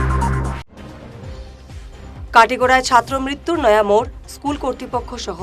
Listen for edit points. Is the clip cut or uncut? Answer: cut